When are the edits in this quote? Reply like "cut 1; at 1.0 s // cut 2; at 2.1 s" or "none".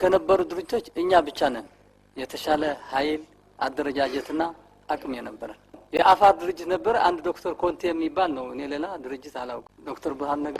cut 1; at 5.8 s // cut 2; at 9.7 s